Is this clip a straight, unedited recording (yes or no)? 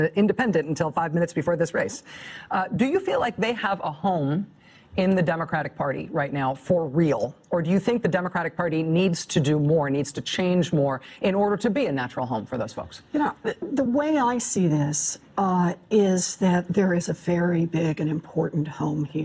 no